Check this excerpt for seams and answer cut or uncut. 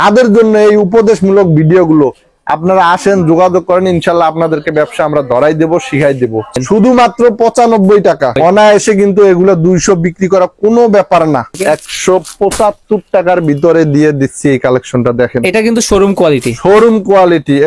cut